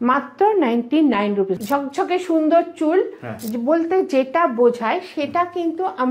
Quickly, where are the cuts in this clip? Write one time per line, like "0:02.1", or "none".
0:01.5